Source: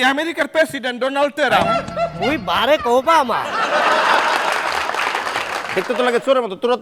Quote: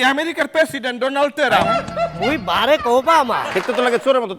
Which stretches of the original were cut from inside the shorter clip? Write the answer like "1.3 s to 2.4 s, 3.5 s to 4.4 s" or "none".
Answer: 3.5 s to 5.7 s